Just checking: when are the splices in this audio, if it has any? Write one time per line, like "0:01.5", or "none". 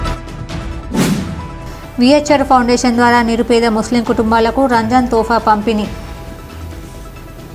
0:01.3